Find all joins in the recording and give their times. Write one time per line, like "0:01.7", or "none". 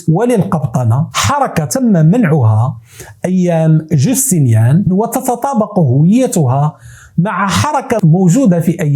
0:01.1
0:04.9
0:08.0